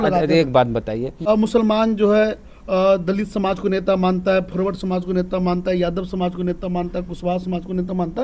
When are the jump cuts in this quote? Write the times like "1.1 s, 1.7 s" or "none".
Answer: 1.3 s